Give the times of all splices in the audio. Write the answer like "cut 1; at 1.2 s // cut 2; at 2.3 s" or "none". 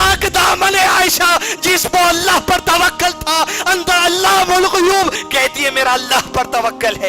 cut 1; at 5.2 s